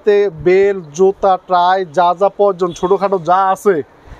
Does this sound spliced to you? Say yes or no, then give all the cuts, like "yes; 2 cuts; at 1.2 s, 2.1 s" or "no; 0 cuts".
no; 0 cuts